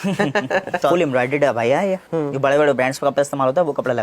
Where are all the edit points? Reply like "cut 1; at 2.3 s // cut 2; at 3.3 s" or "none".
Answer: cut 1; at 0.8 s // cut 2; at 2.1 s